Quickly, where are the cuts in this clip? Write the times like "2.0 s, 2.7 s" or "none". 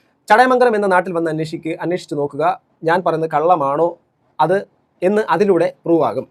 none